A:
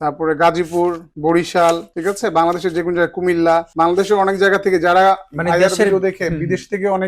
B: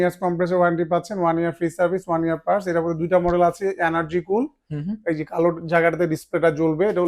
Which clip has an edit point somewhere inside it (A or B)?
A